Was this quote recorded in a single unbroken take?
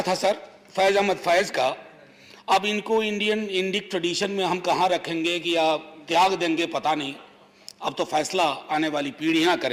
yes; 0 cuts

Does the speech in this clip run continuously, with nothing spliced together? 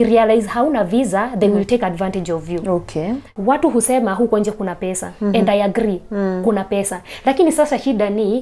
no; 1 cut; at 3.2 s

